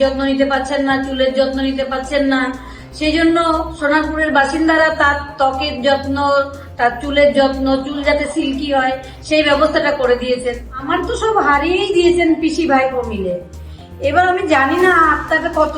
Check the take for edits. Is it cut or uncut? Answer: cut